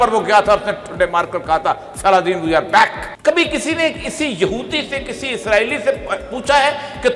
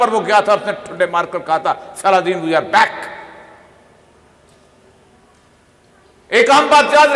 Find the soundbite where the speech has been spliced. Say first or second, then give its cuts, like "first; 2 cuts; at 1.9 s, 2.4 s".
first; 1 cut; at 3.1 s